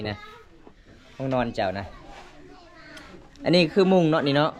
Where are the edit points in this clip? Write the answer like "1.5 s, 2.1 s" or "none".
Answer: none